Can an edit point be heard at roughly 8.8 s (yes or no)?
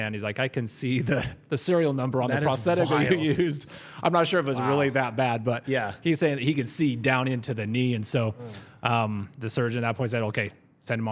no